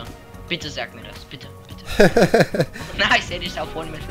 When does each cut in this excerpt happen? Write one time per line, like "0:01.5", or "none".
0:02.8